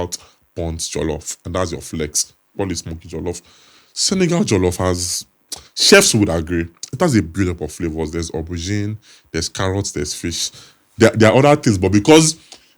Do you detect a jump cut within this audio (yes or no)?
no